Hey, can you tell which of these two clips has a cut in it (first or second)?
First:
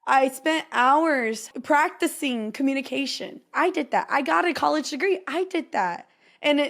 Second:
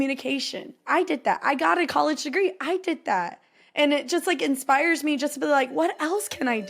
first